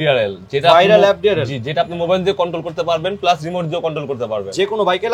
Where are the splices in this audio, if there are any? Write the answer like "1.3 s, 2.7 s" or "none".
none